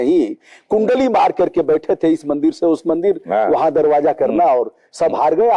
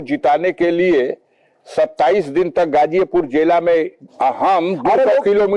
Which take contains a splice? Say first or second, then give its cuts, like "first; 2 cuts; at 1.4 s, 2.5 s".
second; 1 cut; at 4.0 s